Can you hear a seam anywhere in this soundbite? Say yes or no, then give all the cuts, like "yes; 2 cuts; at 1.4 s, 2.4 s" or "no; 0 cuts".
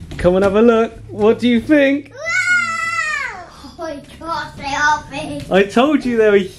no; 0 cuts